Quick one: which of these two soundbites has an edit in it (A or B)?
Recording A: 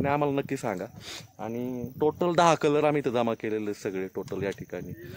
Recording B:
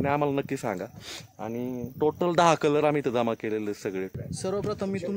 B